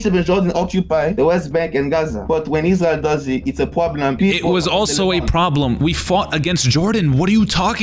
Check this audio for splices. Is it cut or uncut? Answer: cut